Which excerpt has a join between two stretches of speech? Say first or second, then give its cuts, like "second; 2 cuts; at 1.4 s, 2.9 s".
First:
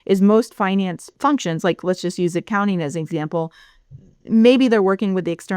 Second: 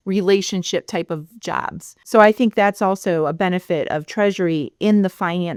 first; 1 cut; at 1.0 s